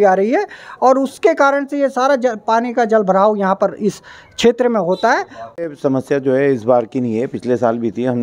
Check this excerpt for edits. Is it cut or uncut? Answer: cut